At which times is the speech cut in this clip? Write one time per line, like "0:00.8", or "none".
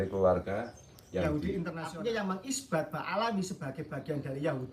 0:01.9